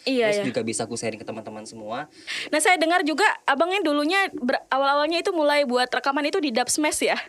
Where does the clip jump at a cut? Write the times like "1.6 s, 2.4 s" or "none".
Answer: 2.3 s

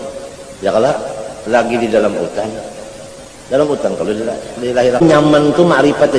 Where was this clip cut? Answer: 5.0 s

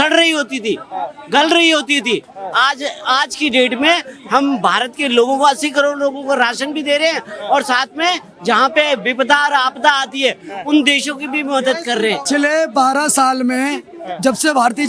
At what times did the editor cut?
12.2 s

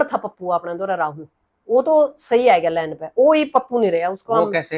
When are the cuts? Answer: none

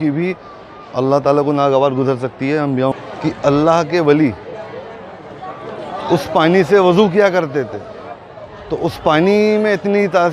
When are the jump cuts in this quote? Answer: 2.9 s

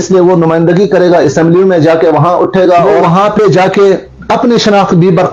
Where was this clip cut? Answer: 2.9 s

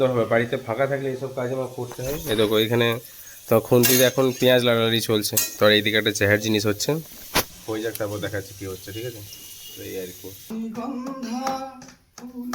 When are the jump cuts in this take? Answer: 5.4 s, 10.5 s

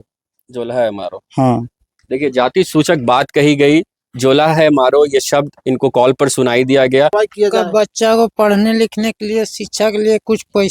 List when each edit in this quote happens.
7.1 s

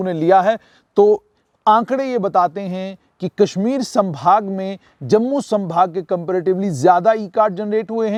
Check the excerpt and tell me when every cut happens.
none

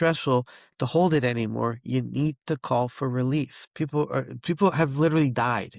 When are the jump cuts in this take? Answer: 3.6 s

